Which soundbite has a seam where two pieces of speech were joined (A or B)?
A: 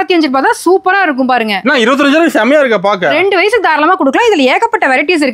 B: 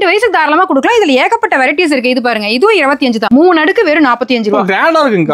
B